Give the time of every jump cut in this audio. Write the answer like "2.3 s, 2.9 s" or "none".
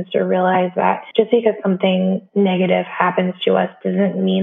1.0 s, 2.2 s